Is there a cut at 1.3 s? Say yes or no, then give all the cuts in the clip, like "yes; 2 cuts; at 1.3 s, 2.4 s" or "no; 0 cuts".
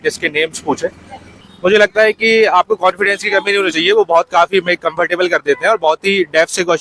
yes; 1 cut; at 1.3 s